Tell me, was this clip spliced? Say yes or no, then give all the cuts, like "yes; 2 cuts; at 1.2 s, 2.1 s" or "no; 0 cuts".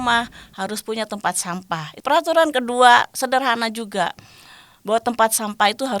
yes; 1 cut; at 1.9 s